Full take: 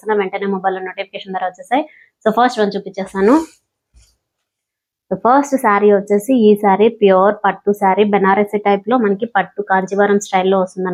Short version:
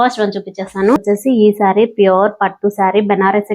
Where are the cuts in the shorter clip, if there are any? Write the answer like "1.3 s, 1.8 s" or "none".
1.0 s

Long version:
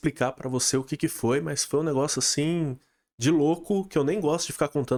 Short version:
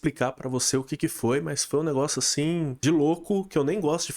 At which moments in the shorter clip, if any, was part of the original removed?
2.7 s

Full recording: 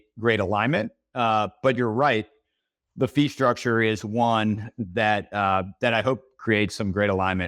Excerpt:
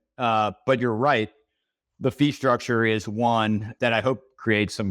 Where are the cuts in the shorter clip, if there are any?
3.7 s

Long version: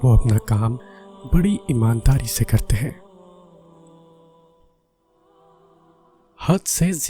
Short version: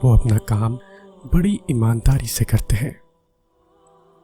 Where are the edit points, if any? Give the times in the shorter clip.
3.0 s

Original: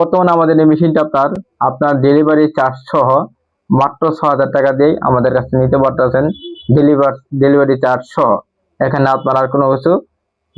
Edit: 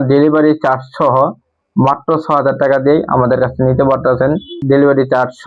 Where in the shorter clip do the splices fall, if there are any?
4.5 s

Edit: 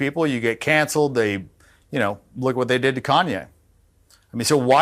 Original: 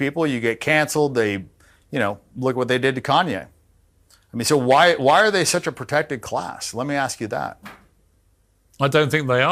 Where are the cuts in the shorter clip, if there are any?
none

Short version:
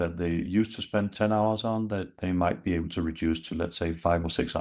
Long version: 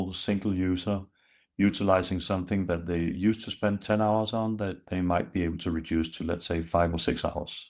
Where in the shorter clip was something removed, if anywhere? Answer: none

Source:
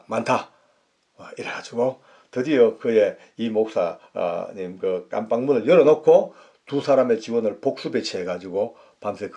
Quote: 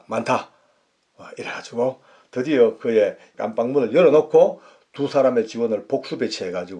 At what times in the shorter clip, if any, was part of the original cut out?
3.3 s

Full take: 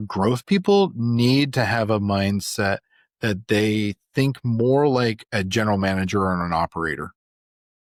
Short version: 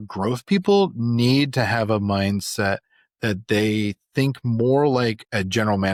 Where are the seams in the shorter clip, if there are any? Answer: none

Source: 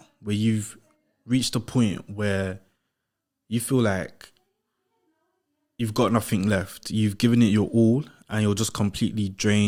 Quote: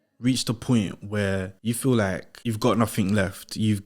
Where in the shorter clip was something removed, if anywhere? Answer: 1.5 s, 2.3 s

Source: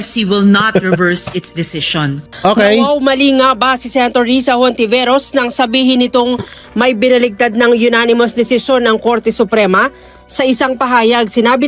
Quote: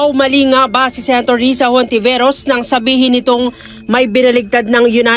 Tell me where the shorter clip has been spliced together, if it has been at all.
none

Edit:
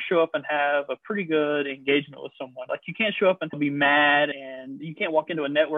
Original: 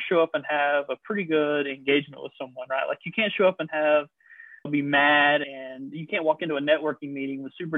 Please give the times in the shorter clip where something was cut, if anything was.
2.6 s, 3.5 s

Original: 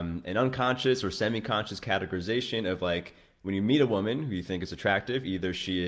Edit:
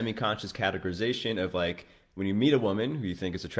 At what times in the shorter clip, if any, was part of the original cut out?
none

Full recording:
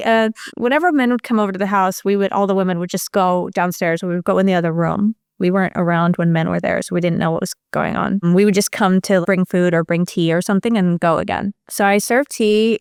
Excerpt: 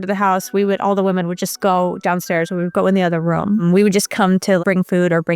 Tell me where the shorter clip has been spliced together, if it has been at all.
3.6 s

